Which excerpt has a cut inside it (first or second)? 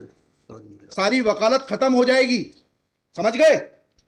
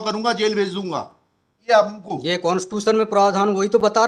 second